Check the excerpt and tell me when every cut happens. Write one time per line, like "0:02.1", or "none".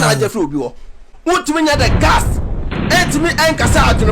0:01.1